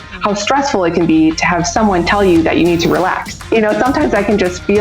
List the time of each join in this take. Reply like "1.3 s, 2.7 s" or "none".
3.5 s